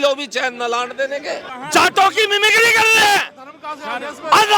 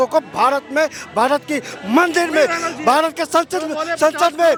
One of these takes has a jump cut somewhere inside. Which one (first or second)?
first